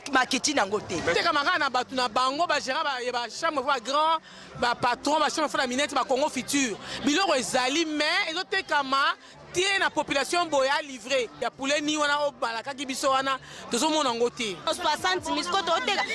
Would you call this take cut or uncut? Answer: cut